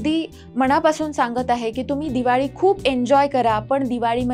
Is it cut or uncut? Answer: uncut